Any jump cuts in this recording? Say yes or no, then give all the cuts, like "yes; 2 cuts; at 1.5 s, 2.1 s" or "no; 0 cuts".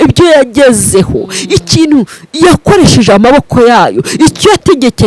no; 0 cuts